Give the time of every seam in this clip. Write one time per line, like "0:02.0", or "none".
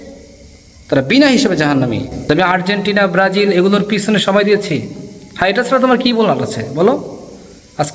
0:02.1